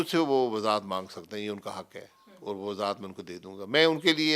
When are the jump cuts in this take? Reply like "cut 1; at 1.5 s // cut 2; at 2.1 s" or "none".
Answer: none